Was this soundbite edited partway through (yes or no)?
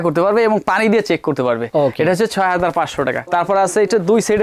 no